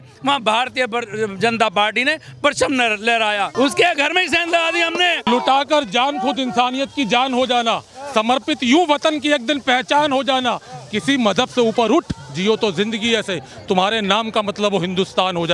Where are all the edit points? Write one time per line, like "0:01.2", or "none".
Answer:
0:03.5
0:05.3